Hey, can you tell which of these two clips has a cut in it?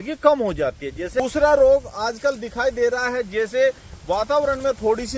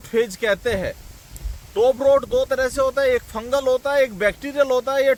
first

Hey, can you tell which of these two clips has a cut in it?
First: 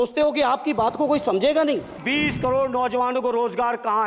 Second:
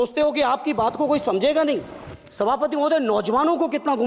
first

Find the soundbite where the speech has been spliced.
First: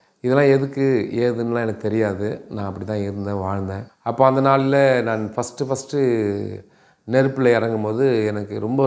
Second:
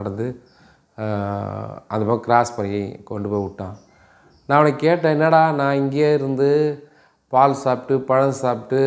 first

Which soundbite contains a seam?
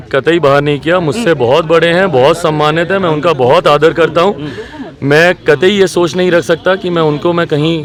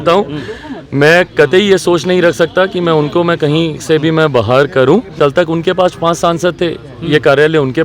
second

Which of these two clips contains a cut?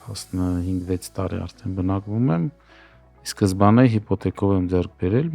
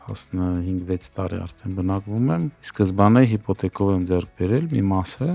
second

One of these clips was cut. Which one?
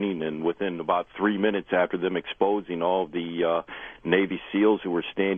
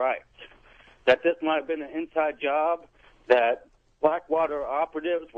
first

